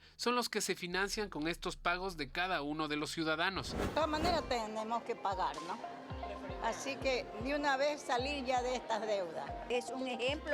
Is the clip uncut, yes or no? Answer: no